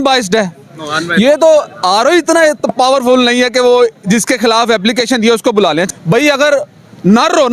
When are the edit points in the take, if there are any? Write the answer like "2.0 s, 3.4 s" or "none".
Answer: 5.9 s